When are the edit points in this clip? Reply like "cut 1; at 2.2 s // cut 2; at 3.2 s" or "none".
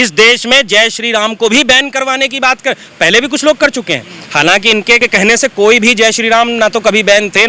none